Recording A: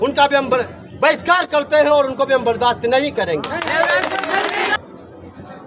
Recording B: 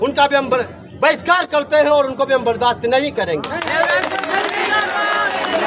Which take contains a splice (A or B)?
A